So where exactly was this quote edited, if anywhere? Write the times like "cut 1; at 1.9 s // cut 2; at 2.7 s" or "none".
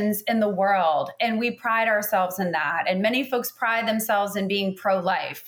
none